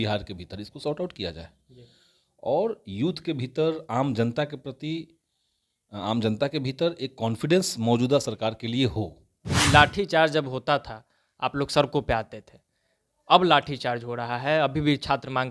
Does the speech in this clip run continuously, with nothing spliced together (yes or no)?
no